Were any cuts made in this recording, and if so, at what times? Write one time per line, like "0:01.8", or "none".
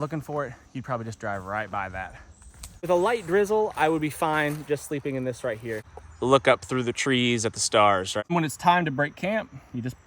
0:02.9
0:05.8
0:08.2